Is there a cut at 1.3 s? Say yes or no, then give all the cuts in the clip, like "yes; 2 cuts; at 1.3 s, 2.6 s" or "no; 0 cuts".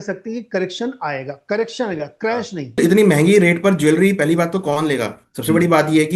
no; 1 cut; at 2.8 s